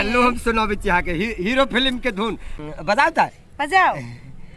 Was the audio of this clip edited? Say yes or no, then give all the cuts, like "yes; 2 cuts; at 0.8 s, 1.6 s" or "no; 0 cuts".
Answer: yes; 1 cut; at 2.7 s